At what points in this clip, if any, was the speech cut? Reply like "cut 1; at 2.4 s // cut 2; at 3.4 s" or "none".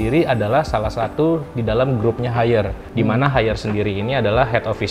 cut 1; at 2.8 s

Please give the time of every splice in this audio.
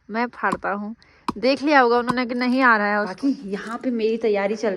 cut 1; at 3.1 s

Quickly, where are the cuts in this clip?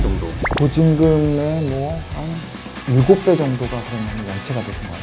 none

